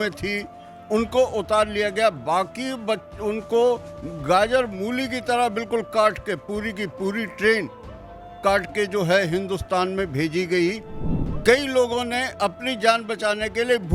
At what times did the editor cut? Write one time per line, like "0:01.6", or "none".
0:10.9

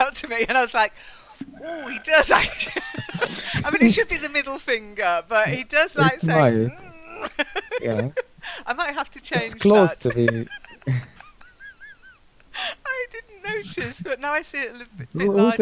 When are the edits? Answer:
0:07.7

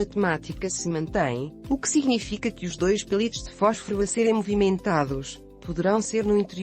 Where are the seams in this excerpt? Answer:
0:03.7

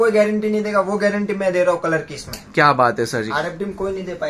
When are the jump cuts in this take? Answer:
none

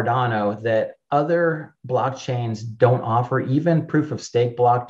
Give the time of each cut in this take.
none

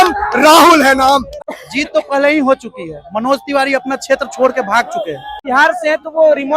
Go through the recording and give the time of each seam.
0:01.3
0:05.3

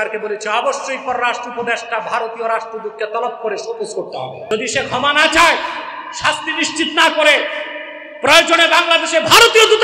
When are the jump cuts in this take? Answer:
0:04.5

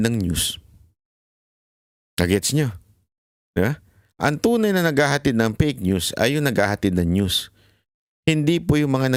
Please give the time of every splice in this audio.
none

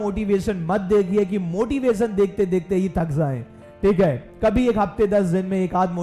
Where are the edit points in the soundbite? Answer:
none

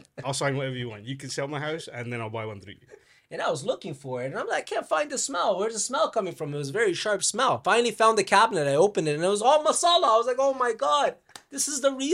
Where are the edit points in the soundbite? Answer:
0:03.0
0:07.6

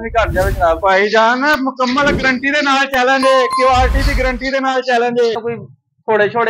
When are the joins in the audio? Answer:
0:05.3

